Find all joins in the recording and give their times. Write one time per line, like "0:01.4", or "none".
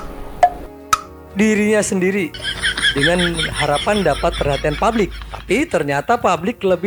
none